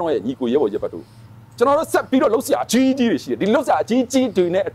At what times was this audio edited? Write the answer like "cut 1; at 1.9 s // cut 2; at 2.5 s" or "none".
none